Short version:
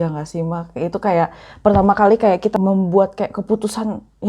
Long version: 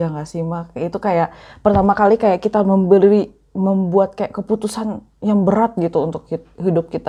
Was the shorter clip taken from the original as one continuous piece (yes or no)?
no